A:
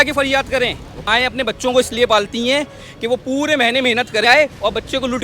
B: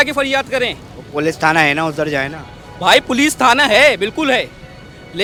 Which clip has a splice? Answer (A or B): A